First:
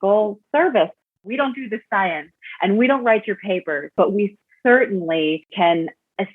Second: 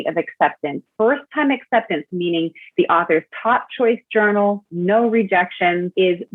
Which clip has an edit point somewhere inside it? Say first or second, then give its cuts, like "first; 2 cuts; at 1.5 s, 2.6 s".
first; 3 cuts; at 1.2 s, 3.9 s, 5.5 s